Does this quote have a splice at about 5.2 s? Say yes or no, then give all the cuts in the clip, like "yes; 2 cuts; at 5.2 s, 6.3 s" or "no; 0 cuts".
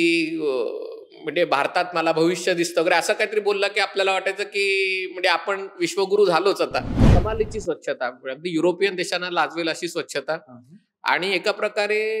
no; 1 cut; at 7.2 s